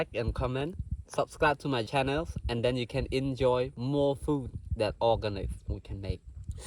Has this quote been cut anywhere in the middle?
yes; 1 cut; at 1.9 s

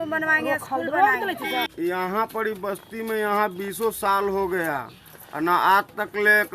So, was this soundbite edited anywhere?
yes; 1 cut; at 1.7 s

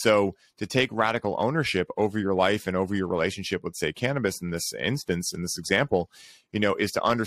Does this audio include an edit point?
no; 0 cuts

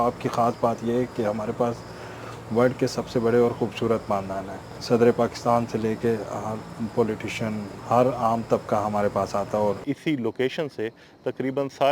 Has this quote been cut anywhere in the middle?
yes; 2 cuts; at 4.7 s, 9.8 s

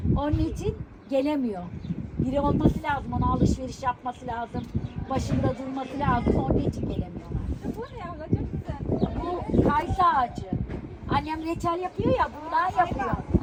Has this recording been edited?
no; 0 cuts

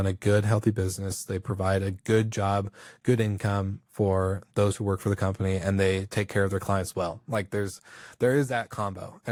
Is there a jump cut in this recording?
no; 0 cuts

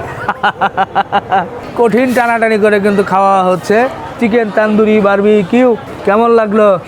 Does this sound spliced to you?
yes; 2 cuts; at 1.6 s, 5.9 s

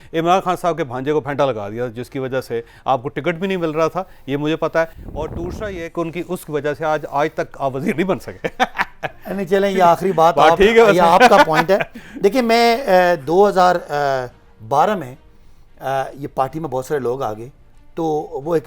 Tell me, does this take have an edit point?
no; 0 cuts

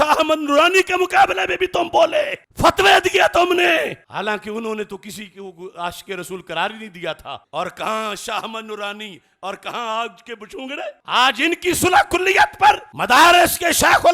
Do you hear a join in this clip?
yes; 2 cuts; at 7.4 s, 11.0 s

